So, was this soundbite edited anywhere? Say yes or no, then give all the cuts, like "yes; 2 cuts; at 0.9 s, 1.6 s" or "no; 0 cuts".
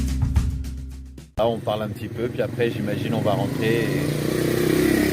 yes; 1 cut; at 1.4 s